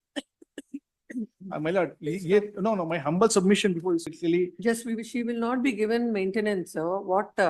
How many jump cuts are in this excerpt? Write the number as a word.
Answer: one